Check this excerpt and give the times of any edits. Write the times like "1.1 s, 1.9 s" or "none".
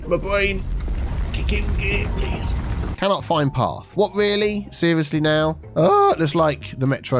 2.9 s, 5.6 s

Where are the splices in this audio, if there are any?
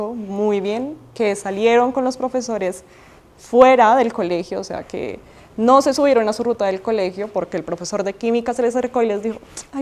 none

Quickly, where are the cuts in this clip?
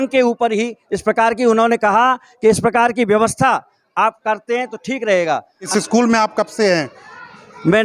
5.6 s

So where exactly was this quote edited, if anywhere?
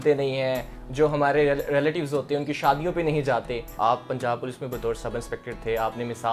3.7 s

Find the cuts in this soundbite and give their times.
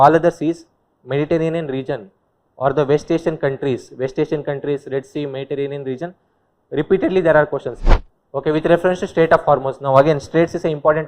7.8 s

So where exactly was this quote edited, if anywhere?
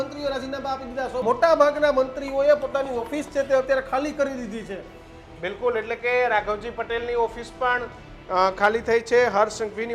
1.2 s

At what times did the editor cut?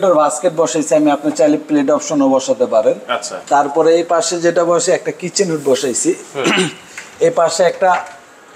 none

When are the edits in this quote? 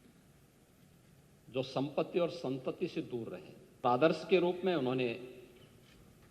3.8 s

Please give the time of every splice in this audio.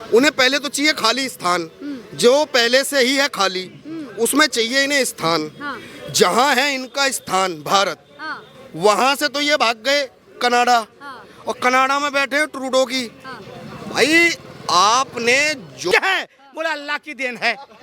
15.9 s

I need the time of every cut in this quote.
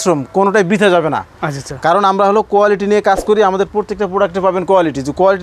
none

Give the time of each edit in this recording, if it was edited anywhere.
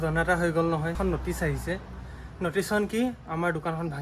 0.9 s

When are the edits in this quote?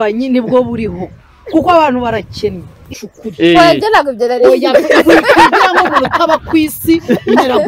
2.9 s

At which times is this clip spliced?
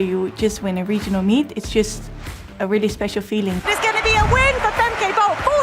3.6 s

